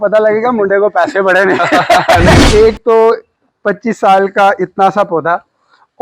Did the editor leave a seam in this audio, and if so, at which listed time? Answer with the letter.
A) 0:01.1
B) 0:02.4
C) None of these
B